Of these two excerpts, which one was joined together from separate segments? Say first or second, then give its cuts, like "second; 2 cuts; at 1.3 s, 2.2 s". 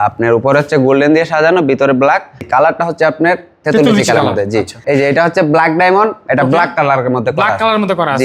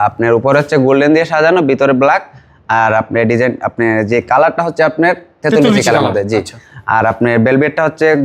first; 2 cuts; at 2.5 s, 4.8 s